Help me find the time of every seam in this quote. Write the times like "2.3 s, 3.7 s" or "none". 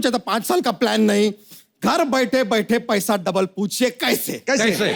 none